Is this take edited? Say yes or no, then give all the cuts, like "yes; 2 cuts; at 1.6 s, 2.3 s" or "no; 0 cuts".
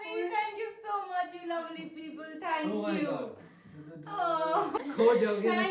yes; 1 cut; at 4.8 s